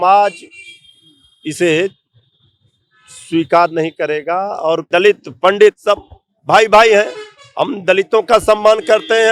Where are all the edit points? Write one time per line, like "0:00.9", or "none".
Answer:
0:04.9